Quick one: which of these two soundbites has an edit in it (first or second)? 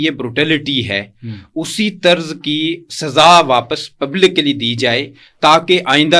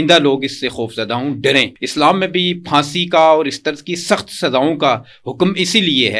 second